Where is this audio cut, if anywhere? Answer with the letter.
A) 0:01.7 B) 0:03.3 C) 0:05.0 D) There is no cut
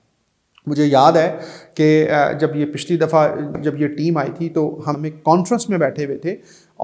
C